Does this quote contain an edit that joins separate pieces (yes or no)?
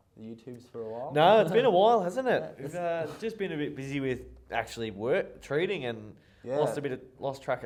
no